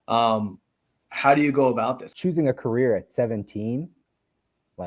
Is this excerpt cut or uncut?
cut